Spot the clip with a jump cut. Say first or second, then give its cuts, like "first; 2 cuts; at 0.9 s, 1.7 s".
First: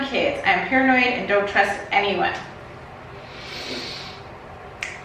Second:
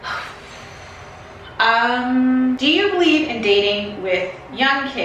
second; 1 cut; at 2.6 s